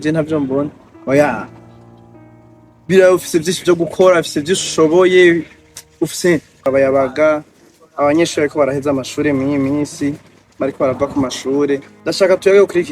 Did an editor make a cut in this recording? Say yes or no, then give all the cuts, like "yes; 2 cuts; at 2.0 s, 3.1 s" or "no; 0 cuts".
yes; 1 cut; at 6.7 s